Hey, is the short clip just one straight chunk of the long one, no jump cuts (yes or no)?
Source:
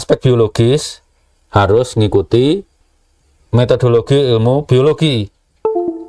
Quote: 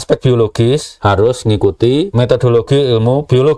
no